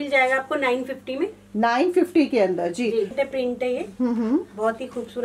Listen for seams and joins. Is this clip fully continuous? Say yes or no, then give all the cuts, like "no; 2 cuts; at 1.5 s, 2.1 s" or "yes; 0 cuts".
no; 1 cut; at 3.1 s